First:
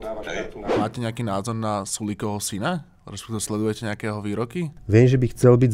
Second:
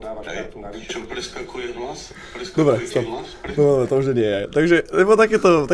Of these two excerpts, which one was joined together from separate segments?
first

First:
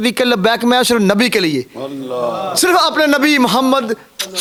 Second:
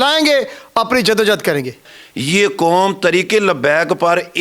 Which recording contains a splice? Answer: second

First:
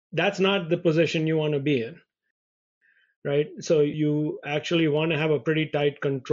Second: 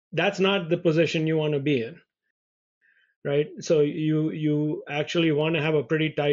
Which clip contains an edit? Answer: first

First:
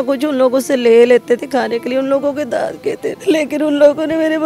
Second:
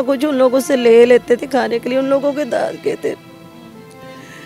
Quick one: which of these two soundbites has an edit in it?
first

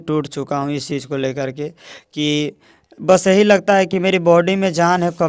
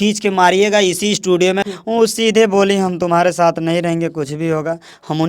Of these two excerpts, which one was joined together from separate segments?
second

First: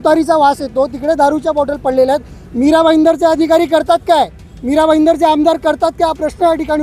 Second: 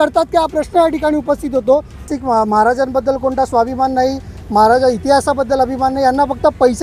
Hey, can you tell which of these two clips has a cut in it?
second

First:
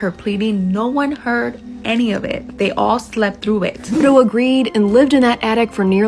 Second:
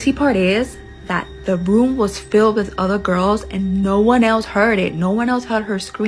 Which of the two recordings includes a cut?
first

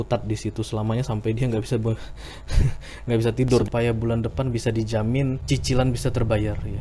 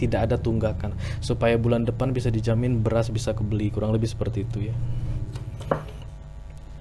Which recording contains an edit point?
first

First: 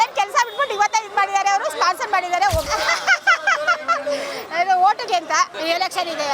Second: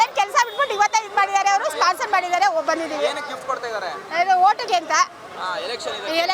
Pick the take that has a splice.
first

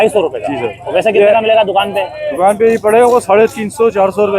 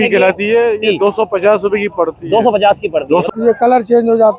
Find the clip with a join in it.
second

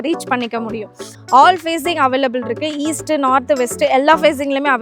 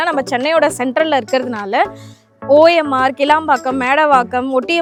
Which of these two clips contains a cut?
first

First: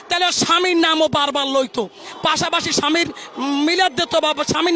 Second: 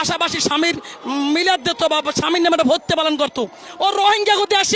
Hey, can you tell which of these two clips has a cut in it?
second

